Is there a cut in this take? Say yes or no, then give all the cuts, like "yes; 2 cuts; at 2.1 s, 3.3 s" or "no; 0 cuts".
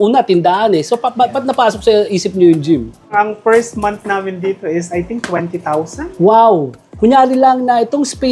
yes; 2 cuts; at 3.1 s, 6.8 s